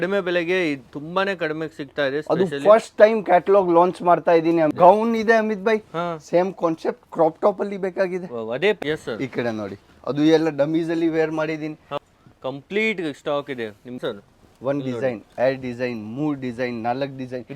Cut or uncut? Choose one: cut